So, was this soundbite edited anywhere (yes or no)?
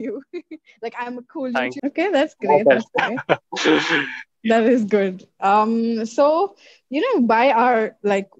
yes